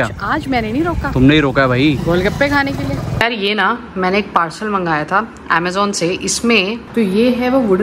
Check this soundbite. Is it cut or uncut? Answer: cut